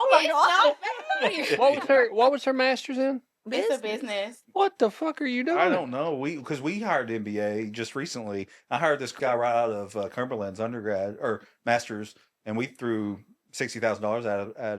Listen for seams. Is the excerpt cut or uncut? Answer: cut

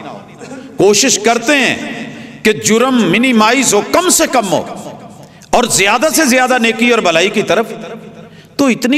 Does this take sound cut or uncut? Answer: uncut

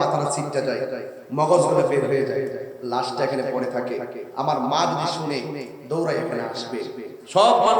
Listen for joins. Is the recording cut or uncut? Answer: uncut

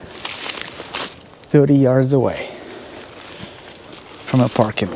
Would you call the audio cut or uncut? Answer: cut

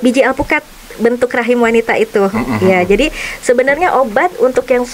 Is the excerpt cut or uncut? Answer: uncut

